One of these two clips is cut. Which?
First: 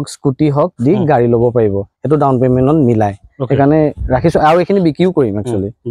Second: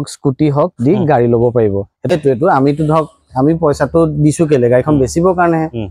second; 1 cut; at 2.1 s

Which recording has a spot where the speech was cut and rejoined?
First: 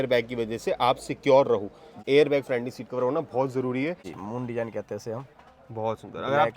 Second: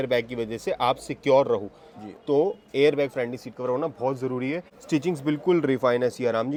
first; 2 cuts; at 2.0 s, 4.1 s

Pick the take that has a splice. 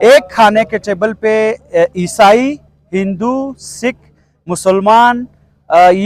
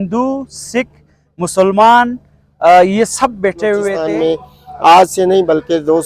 second; 1 cut; at 4.0 s

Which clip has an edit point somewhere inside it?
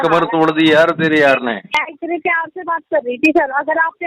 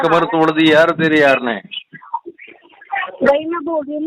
first; 1 cut; at 1.7 s

